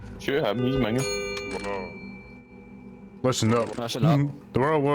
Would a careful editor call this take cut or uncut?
uncut